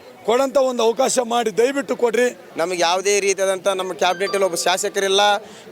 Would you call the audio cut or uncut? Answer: cut